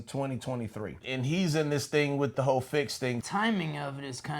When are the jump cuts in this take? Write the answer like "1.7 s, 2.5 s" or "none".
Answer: 1.0 s, 2.3 s, 3.2 s

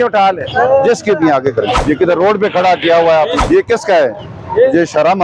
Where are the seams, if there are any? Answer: 1.8 s, 3.4 s

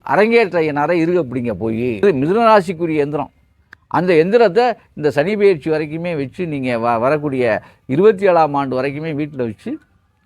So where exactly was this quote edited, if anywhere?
2.0 s

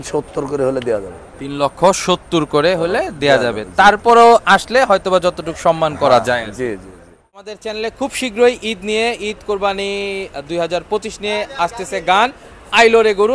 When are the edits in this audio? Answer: 7.6 s

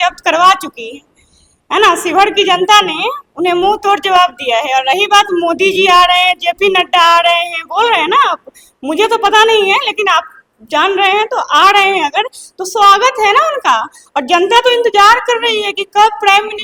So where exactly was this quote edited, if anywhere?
none

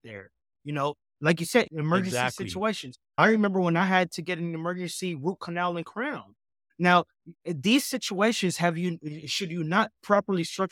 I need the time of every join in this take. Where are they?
6.6 s

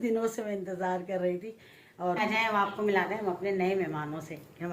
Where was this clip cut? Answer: 2.2 s

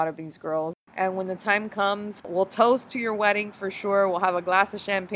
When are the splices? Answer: 0.8 s, 2.1 s

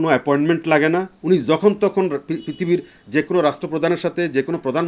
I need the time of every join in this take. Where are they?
1.1 s

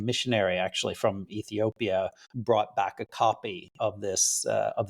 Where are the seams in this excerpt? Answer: 2.3 s

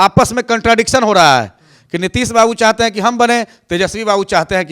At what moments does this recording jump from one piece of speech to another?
none

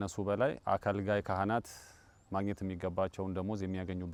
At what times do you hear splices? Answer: none

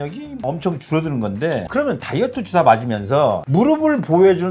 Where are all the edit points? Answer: 1.7 s

